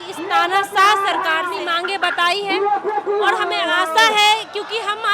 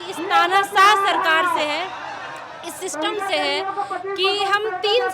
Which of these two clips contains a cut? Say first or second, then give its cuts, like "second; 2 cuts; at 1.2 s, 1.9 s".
first; 1 cut; at 1.6 s